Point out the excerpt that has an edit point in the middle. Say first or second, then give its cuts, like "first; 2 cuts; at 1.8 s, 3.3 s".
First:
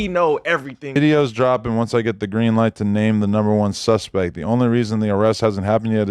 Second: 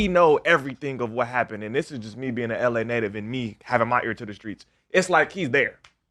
first; 1 cut; at 1.0 s